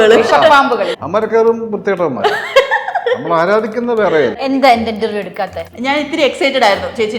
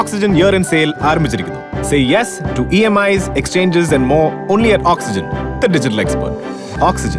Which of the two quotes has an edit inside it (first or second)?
first